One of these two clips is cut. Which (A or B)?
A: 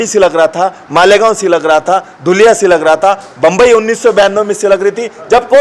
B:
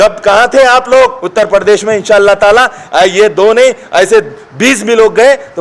B